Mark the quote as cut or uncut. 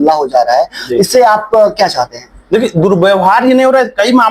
uncut